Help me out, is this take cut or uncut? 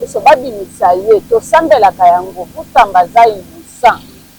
uncut